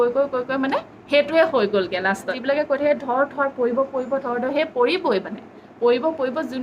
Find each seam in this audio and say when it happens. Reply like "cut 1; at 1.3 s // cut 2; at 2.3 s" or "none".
cut 1; at 2.3 s